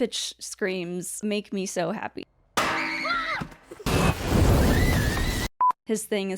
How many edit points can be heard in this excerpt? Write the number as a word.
three